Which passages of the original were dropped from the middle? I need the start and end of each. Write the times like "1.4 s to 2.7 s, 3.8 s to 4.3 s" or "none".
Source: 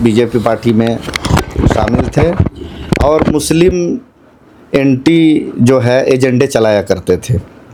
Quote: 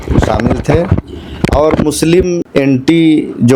3.9 s to 4.6 s

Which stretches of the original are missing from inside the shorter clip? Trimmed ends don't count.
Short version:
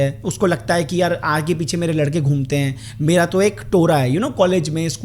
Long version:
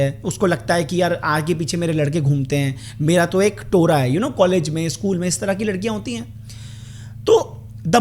none

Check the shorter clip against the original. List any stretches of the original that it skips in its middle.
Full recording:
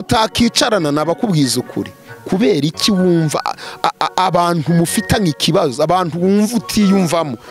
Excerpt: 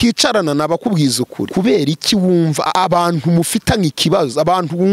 1.8 s to 2.2 s, 3.4 s to 4.1 s

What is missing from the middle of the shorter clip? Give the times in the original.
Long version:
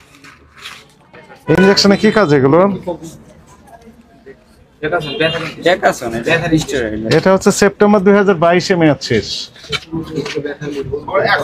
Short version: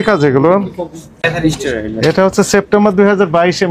3.3 s to 6.3 s

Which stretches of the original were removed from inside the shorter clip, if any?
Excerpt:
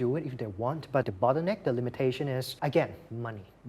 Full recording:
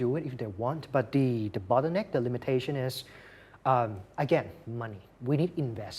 1.1 s to 1.6 s, 3.0 s to 4.0 s

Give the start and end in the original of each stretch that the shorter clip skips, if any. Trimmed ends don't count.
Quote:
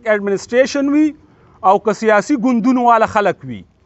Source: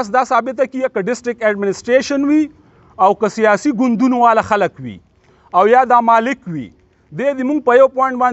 none

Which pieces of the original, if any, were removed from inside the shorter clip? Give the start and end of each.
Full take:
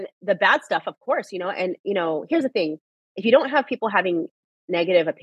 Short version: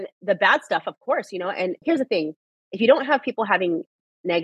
1.8 s to 2.2 s

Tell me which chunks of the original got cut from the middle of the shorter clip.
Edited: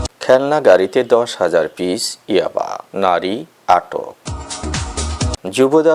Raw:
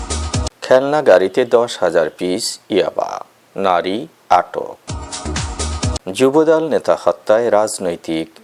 3.2 s to 3.4 s

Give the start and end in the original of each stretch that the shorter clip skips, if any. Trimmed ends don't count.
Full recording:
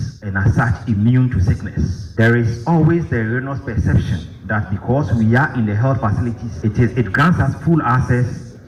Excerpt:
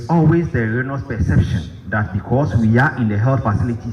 none

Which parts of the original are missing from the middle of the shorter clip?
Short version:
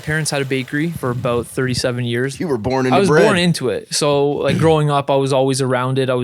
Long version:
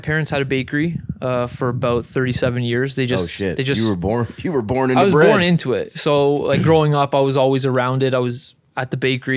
1.0 s to 1.5 s, 2.9 s to 4.4 s

